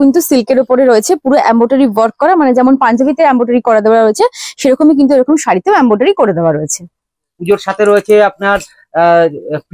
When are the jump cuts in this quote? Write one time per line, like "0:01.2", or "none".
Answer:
0:07.3